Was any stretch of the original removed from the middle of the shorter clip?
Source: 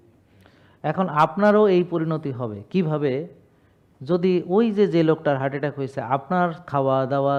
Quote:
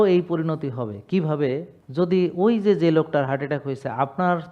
yes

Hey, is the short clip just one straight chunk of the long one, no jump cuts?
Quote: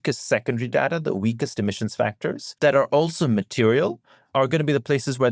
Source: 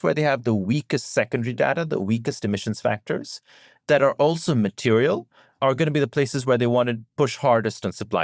no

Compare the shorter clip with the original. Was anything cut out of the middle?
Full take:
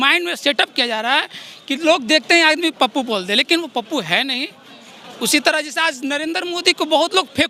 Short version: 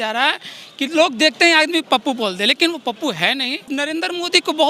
yes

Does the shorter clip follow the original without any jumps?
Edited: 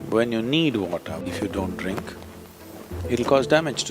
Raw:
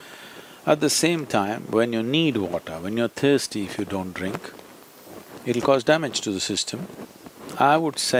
no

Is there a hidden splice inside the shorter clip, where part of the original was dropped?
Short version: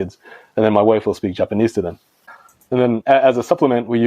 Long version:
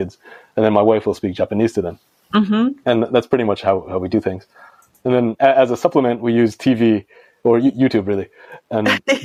yes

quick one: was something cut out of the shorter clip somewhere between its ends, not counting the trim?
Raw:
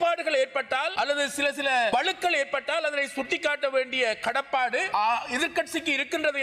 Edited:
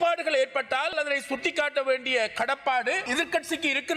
yes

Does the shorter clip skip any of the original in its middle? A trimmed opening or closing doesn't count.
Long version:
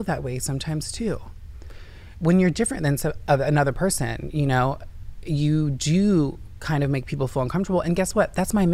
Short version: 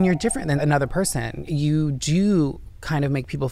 yes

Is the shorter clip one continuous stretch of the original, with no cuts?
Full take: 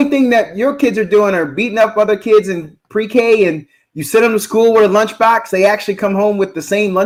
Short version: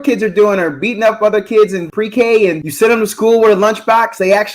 no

